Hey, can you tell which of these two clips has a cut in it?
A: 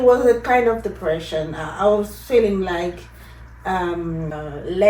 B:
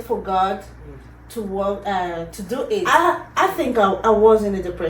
B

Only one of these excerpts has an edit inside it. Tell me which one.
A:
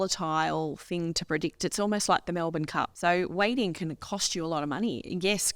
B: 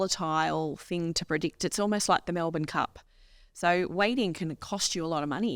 A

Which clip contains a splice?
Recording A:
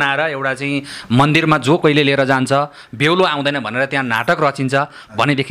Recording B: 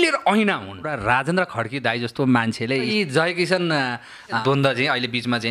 B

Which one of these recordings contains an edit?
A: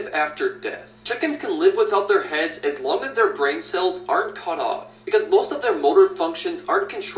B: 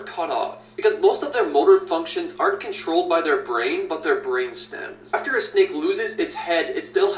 B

